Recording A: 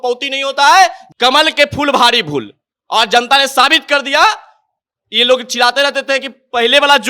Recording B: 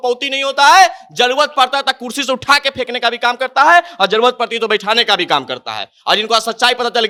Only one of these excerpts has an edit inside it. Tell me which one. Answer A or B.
A